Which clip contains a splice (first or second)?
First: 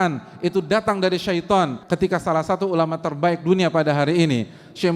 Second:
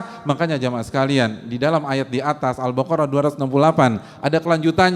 first